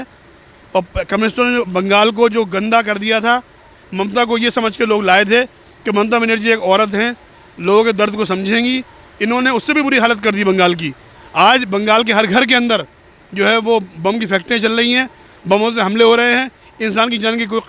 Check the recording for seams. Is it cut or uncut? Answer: uncut